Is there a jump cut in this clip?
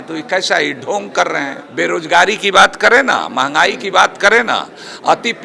yes; 1 cut; at 1.6 s

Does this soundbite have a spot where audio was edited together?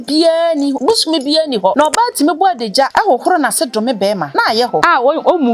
yes; 4 cuts; at 0.8 s, 1.7 s, 2.9 s, 4.6 s

